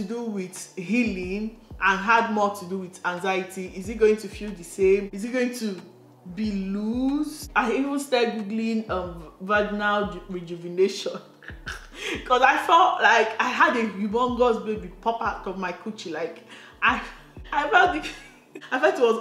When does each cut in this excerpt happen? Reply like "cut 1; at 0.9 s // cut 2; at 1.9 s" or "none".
cut 1; at 5.2 s // cut 2; at 7.4 s